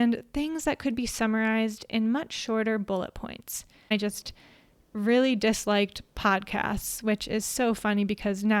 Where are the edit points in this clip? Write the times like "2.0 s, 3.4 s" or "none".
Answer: 3.9 s